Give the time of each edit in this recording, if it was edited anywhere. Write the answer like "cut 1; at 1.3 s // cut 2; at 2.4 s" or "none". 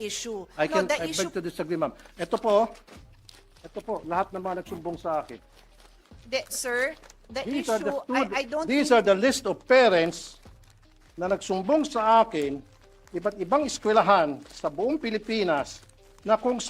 none